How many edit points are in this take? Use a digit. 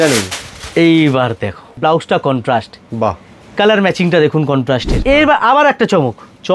2